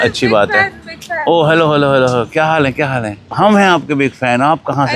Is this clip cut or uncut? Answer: cut